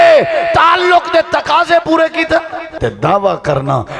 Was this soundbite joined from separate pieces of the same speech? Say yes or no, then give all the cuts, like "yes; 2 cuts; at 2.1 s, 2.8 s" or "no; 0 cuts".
yes; 1 cut; at 2.8 s